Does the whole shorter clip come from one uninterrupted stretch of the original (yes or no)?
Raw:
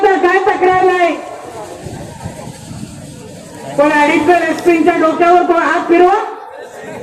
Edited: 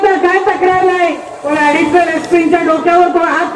no